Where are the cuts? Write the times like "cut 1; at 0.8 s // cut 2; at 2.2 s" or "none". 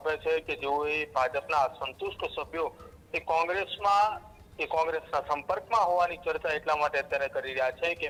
none